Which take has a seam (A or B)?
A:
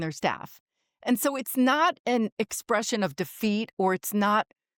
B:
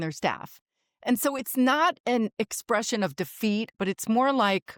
B